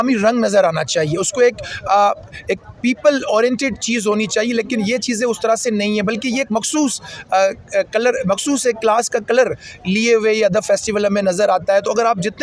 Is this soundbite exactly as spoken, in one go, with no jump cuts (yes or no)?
yes